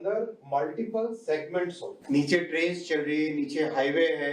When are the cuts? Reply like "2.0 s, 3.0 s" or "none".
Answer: 1.9 s